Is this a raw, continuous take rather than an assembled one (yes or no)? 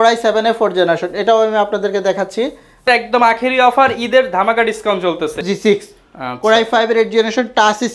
no